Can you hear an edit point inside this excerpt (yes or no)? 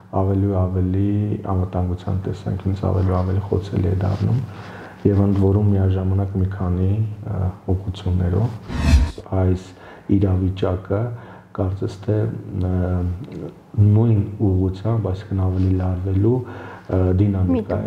yes